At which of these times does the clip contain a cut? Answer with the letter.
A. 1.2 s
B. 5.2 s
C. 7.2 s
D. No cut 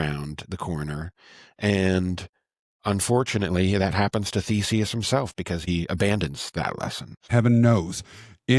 C